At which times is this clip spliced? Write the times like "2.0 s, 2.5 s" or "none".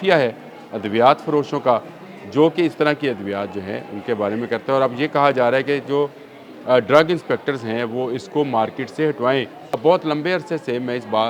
9.8 s